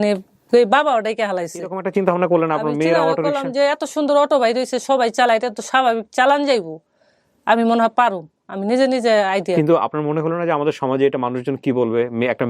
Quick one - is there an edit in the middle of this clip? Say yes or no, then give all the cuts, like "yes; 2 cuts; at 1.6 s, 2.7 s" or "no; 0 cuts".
yes; 1 cut; at 1.8 s